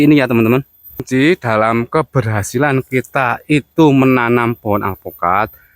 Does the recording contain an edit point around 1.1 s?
yes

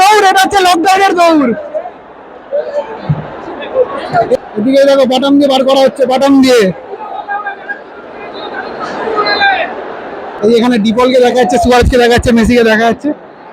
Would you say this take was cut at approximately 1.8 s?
no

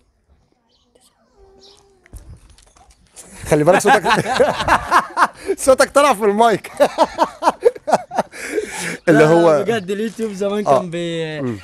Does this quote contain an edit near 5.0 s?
no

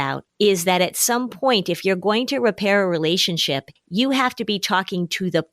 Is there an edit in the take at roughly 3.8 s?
yes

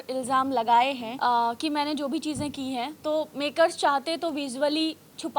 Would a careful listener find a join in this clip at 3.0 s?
no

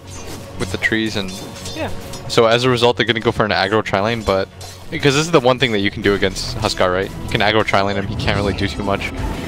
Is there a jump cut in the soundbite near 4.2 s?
yes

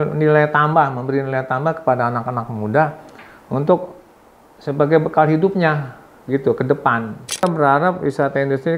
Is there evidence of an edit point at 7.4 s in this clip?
yes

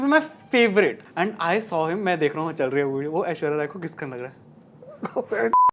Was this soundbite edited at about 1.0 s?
yes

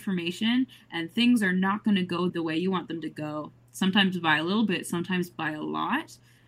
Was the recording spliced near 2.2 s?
yes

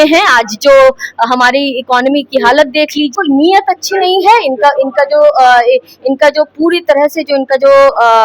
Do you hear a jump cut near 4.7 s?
no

